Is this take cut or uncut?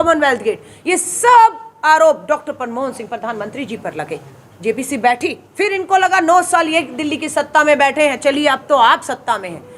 cut